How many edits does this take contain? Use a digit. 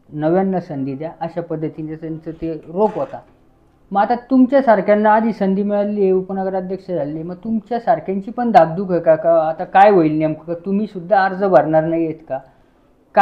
0